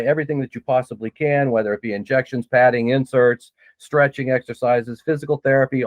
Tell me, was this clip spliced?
no; 0 cuts

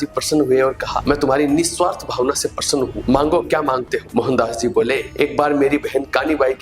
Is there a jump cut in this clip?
no; 0 cuts

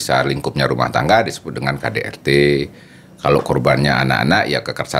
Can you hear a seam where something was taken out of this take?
no; 0 cuts

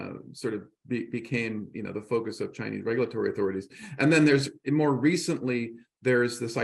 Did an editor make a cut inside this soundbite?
no; 0 cuts

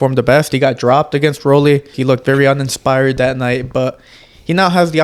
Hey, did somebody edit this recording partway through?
yes; 1 cut; at 2.0 s

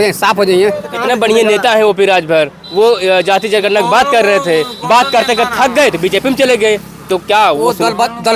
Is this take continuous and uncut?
no; 1 cut; at 0.9 s

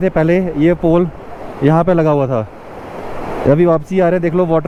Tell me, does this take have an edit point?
no; 0 cuts

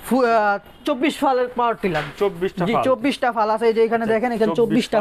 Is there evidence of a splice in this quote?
no; 0 cuts

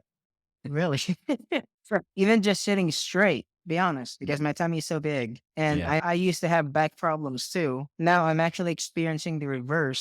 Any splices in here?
yes; 2 cuts; at 6.0 s, 7.9 s

